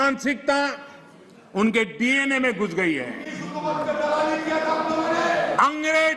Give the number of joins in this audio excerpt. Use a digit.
0